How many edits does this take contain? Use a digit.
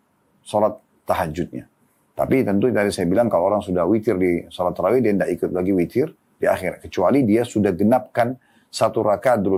0